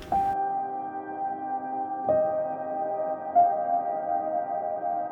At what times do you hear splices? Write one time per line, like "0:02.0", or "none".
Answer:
none